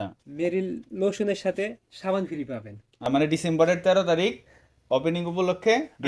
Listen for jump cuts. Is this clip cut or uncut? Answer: cut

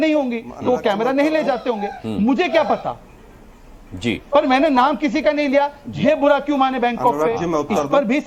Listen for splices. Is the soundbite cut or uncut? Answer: uncut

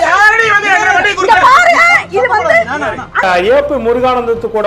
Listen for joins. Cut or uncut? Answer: cut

